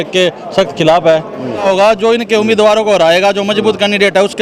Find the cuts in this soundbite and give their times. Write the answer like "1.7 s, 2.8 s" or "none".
1.7 s

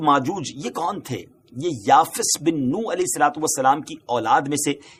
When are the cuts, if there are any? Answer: none

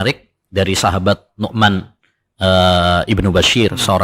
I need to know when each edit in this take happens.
none

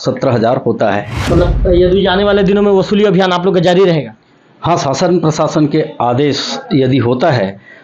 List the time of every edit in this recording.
1.1 s

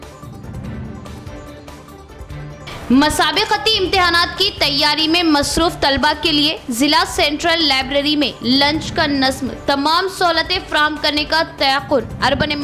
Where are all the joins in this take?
none

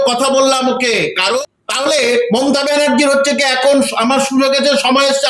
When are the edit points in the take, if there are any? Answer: 1.4 s

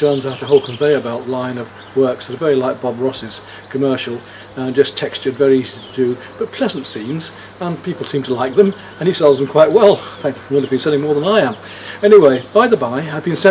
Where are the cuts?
none

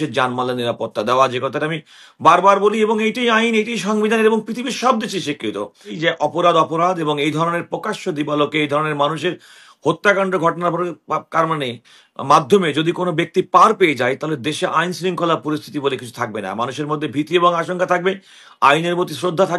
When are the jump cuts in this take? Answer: 5.9 s

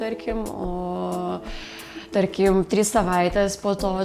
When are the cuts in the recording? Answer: none

